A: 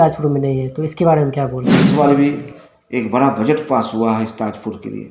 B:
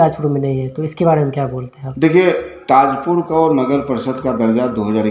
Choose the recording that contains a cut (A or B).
A